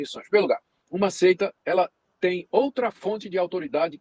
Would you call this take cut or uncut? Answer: uncut